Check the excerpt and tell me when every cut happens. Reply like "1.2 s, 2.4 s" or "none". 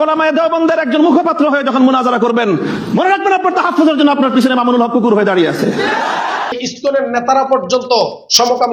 6.6 s